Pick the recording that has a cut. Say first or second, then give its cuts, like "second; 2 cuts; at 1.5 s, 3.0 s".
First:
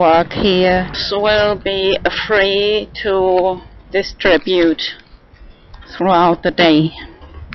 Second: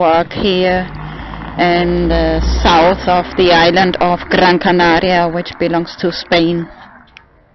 second; 1 cut; at 1.0 s